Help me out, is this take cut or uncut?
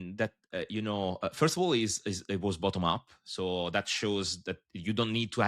uncut